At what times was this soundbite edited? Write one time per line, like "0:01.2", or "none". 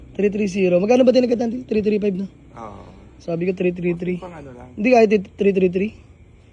none